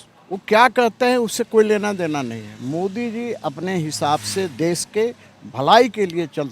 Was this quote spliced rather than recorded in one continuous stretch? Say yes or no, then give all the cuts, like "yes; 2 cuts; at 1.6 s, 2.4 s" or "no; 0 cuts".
no; 0 cuts